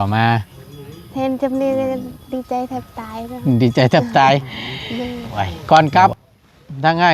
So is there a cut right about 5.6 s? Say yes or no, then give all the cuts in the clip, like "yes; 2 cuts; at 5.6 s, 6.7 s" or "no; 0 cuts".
yes; 1 cut; at 5.6 s